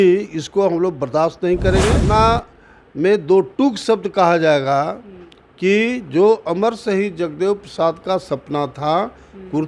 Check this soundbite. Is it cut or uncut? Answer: cut